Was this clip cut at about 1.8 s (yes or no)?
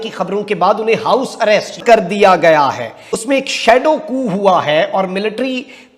yes